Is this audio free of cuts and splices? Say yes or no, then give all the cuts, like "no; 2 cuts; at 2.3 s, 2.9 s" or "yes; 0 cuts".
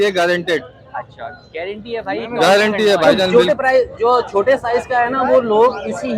no; 1 cut; at 3.0 s